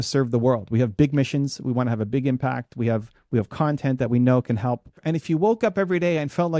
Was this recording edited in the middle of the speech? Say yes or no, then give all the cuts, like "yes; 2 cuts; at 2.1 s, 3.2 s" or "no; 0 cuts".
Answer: yes; 1 cut; at 5.0 s